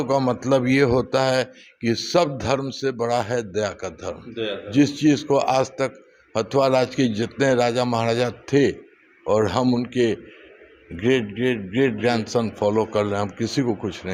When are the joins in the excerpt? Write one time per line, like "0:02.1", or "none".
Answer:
none